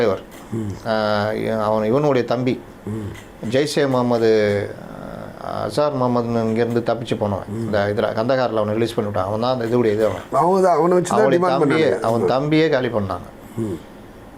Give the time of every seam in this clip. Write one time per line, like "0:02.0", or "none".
none